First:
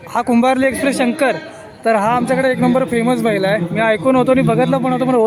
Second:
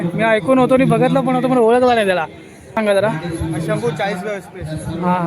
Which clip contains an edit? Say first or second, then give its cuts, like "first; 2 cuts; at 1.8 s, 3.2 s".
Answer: second; 1 cut; at 2.7 s